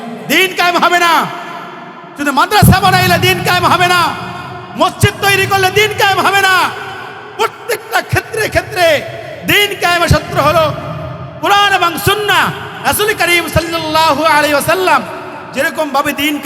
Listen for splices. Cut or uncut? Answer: uncut